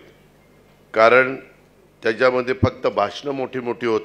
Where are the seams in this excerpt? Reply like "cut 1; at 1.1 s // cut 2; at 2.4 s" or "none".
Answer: none